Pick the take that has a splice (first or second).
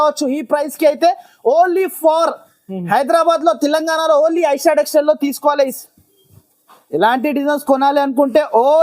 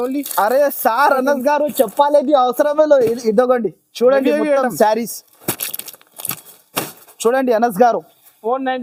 first